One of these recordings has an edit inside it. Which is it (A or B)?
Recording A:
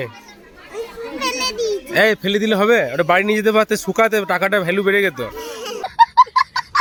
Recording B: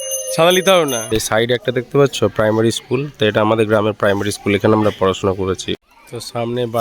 B